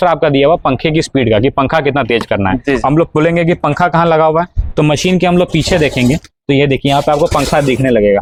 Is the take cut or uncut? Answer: uncut